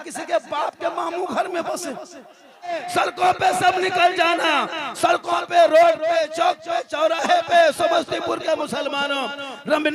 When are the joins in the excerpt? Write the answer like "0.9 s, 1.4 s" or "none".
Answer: 2.7 s

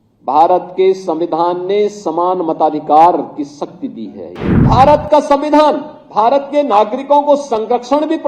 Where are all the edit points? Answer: 4.4 s

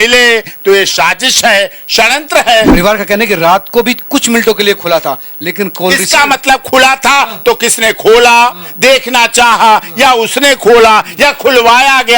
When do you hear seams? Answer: 2.7 s

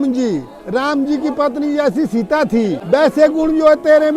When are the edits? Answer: 2.8 s

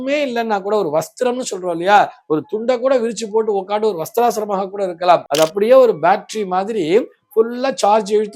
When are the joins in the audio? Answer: 5.2 s

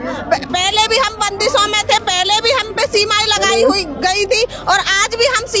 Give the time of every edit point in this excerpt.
none

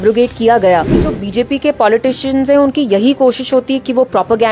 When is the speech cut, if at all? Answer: 1.1 s

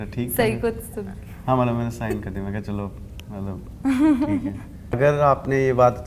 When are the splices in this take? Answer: 4.9 s

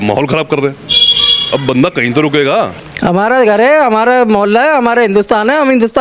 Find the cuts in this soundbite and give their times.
2.8 s

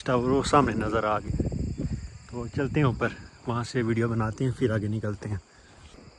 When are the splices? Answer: none

